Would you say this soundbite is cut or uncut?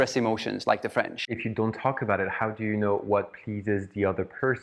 cut